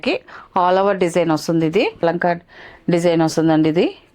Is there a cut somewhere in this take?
yes; 1 cut; at 2.0 s

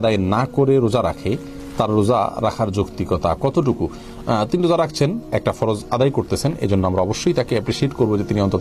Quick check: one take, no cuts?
yes; 0 cuts

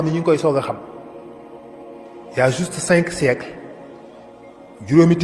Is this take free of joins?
no; 2 cuts; at 0.9 s, 2.3 s

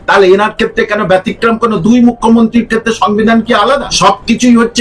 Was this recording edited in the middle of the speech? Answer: yes; 1 cut; at 3.9 s

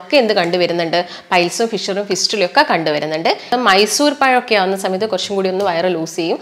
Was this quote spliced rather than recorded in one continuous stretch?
yes; 1 cut; at 3.5 s

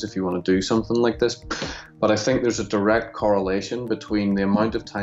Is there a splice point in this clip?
no; 0 cuts

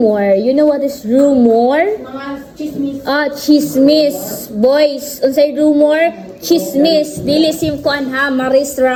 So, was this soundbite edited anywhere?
no; 0 cuts

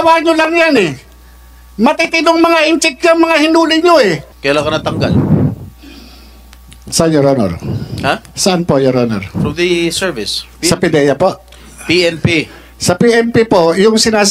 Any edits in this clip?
yes; 1 cut; at 4.3 s

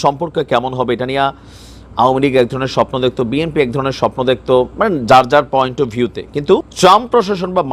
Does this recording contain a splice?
yes; 1 cut; at 6.7 s

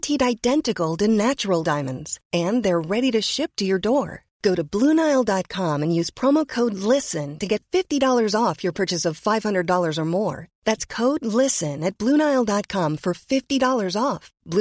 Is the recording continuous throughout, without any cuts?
yes; 0 cuts

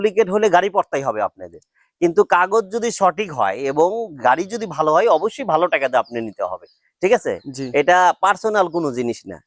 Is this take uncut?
yes; 0 cuts

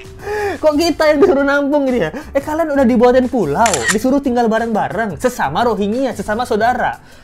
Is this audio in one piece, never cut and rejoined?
yes; 0 cuts

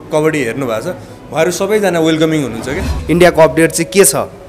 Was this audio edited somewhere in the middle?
yes; 1 cut; at 2.9 s

